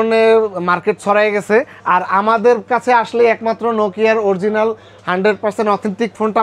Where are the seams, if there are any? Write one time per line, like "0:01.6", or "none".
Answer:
none